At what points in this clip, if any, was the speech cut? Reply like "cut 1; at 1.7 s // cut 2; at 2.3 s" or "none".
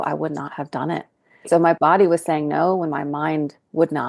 cut 1; at 1.5 s